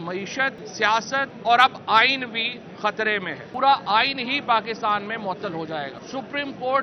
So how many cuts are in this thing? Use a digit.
3